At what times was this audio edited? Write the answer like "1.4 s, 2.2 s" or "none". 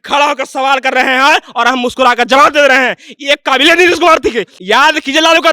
4.5 s